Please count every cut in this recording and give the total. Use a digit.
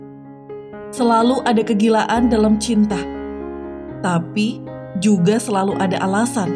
1